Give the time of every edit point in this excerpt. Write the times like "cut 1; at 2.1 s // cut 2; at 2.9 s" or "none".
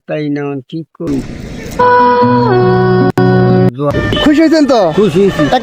cut 1; at 3.7 s